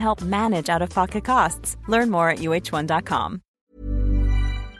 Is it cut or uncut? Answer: cut